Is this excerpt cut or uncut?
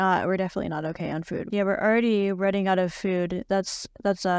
cut